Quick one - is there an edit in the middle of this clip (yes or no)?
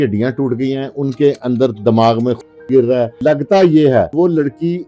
yes